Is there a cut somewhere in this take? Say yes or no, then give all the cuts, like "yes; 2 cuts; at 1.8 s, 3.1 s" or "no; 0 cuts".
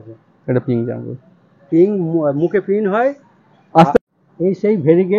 yes; 1 cut; at 4.0 s